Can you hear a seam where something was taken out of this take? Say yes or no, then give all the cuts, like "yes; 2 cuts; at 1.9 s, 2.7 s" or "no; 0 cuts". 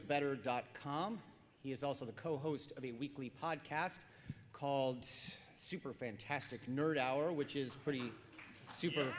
yes; 1 cut; at 3.1 s